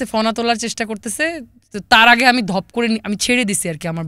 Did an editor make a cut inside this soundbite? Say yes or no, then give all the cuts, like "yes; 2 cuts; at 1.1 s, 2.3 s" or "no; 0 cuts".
no; 0 cuts